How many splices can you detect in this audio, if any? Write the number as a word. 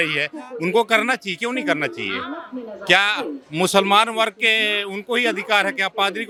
zero